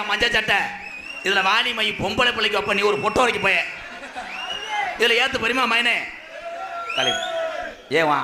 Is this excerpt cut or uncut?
uncut